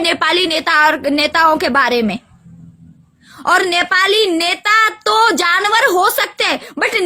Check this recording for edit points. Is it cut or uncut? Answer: uncut